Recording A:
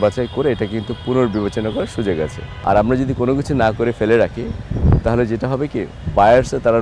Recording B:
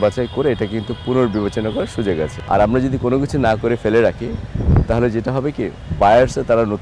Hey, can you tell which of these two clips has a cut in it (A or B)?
B